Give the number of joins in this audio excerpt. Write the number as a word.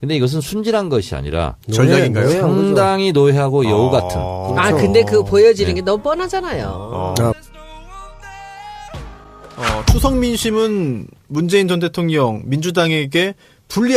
one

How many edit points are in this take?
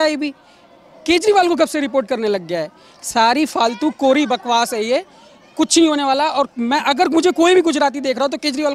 zero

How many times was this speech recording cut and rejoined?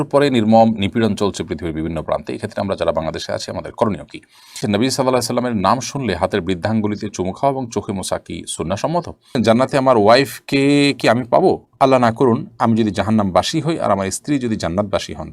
two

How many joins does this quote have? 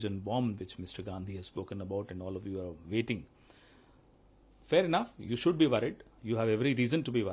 zero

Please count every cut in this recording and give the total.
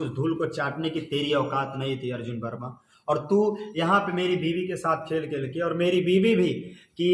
zero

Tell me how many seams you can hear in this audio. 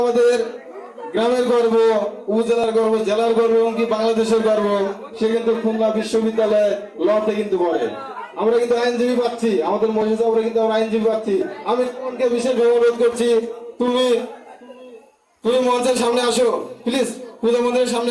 zero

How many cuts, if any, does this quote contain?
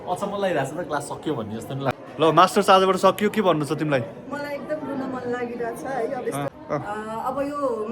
two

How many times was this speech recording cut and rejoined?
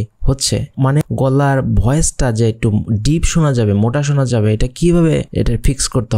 one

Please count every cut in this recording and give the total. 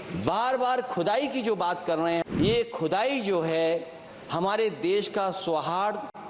one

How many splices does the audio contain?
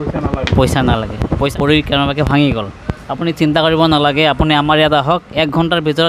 one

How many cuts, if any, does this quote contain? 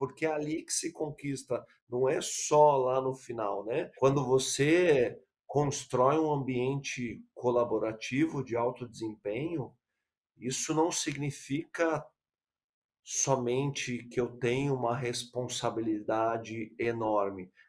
one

